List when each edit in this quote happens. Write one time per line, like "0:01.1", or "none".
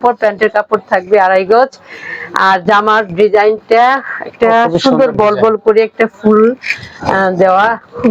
none

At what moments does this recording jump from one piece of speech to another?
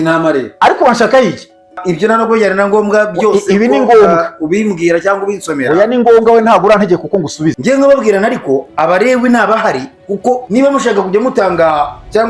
0:01.8
0:07.6
0:10.4

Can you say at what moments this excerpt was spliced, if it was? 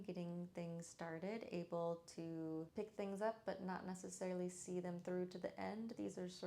0:02.7

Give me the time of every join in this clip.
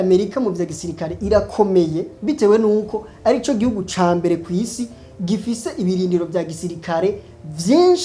0:02.1

